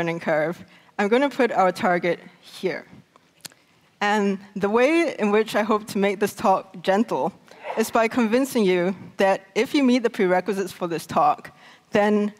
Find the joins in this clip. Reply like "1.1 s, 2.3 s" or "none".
9.7 s